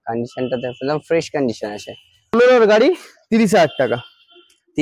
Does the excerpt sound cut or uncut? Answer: cut